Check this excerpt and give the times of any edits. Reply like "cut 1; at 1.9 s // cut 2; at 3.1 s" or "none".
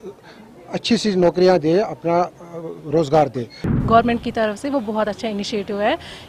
cut 1; at 3.6 s